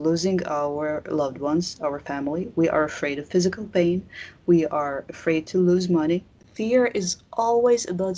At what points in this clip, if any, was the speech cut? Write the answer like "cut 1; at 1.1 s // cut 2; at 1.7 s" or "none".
cut 1; at 6.4 s